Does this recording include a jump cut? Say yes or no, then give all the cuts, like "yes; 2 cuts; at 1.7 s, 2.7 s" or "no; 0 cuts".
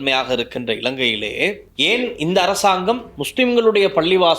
yes; 2 cuts; at 1.7 s, 3.2 s